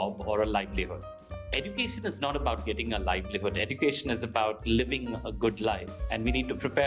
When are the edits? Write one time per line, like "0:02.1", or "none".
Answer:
none